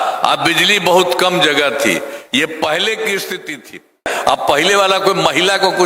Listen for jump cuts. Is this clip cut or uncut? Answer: cut